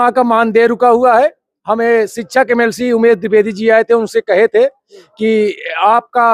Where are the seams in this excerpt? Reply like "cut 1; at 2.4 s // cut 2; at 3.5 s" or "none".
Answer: none